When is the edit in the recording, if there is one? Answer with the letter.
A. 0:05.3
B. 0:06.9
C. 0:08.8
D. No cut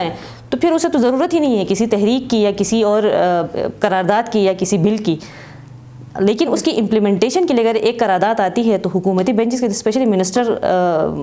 D